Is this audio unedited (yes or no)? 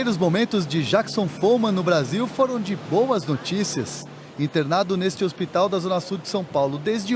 yes